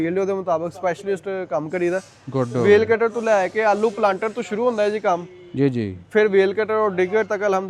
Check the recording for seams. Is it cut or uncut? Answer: uncut